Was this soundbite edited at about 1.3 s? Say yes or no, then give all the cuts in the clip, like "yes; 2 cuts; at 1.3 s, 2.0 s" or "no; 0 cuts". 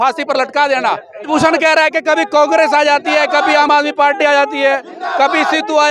yes; 1 cut; at 1.3 s